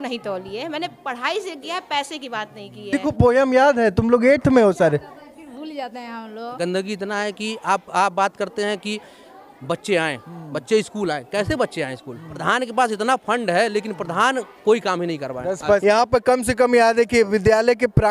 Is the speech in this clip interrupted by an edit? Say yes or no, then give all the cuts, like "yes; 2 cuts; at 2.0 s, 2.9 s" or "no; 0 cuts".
yes; 4 cuts; at 3.0 s, 6.5 s, 12.4 s, 15.8 s